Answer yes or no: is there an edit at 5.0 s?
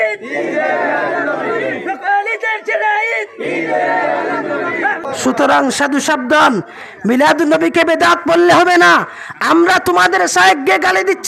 yes